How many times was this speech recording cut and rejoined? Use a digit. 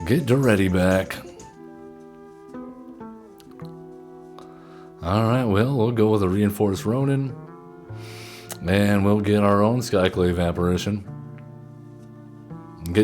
1